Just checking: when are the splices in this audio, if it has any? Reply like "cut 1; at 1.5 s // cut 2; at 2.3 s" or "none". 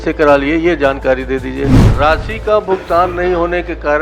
cut 1; at 1.8 s

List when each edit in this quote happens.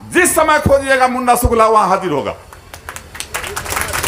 none

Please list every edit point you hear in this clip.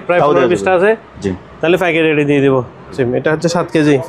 cut 1; at 3.0 s

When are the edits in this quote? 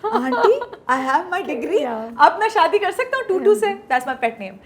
none

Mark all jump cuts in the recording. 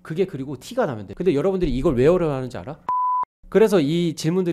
cut 1; at 1.1 s // cut 2; at 3.2 s

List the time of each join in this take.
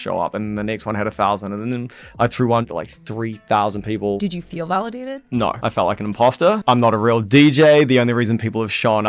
cut 1; at 2.7 s // cut 2; at 4.2 s // cut 3; at 5.6 s // cut 4; at 6.6 s

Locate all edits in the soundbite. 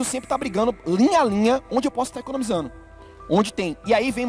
none

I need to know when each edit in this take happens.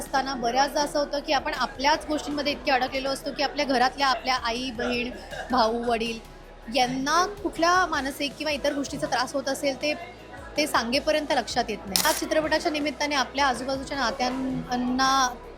cut 1; at 12.0 s

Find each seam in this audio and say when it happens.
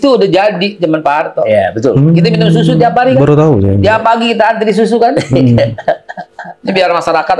none

